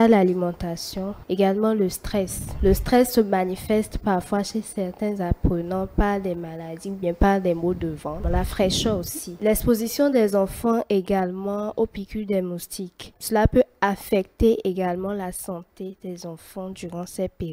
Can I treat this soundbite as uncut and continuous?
no; 4 cuts; at 1.2 s, 2.4 s, 8.2 s, 9.4 s

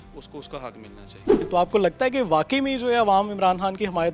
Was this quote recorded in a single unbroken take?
no; 1 cut; at 1.4 s

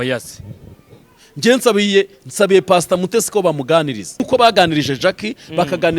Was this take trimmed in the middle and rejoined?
yes; 1 cut; at 4.2 s

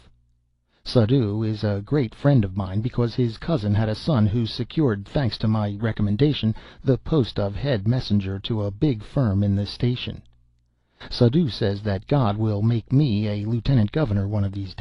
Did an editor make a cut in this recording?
yes; 1 cut; at 13.9 s

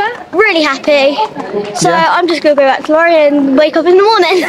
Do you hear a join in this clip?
no; 0 cuts

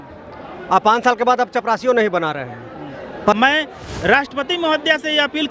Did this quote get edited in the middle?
yes; 1 cut; at 3.3 s

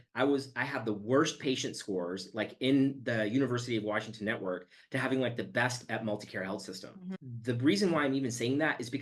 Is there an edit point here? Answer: no; 0 cuts

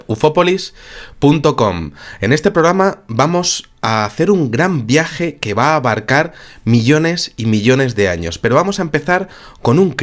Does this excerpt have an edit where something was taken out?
no; 0 cuts

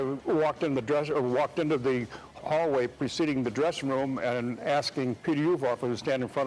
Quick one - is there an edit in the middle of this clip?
yes; 2 cuts; at 2.3 s, 5.2 s

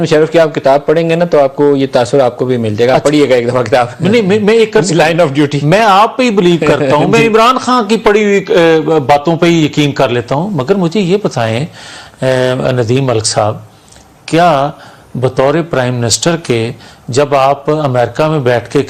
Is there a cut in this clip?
no; 0 cuts

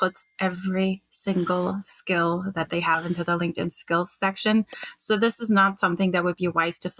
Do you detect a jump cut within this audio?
no; 0 cuts

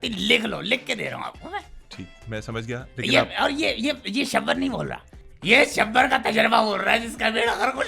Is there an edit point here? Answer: no; 0 cuts

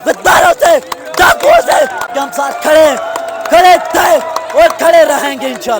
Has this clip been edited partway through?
yes; 1 cut; at 2.1 s

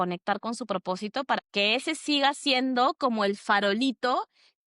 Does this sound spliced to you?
yes; 1 cut; at 1.4 s

